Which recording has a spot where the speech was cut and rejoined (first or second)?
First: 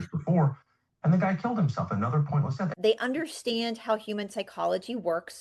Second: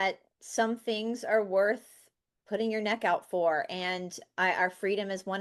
first